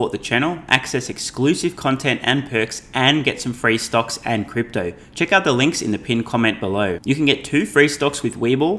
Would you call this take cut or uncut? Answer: uncut